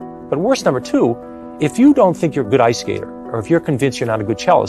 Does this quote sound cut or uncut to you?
uncut